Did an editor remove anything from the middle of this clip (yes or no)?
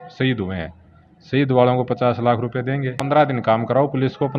yes